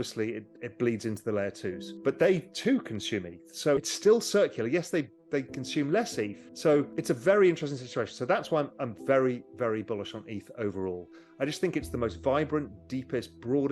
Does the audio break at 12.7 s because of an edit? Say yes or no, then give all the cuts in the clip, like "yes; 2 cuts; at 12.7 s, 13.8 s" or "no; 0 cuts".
no; 2 cuts; at 3.8 s, 6.5 s